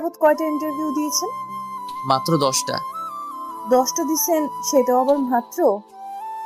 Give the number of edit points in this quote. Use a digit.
0